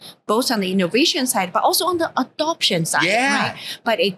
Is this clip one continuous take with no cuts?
yes; 0 cuts

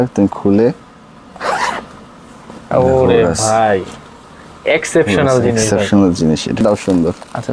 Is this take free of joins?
no; 1 cut; at 6.6 s

